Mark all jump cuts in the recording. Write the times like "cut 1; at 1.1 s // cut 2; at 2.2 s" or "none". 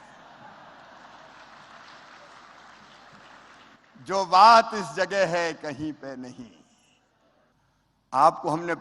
cut 1; at 7.5 s